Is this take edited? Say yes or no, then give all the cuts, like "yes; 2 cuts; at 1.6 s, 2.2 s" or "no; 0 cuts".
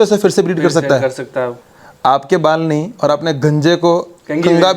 yes; 1 cut; at 1.6 s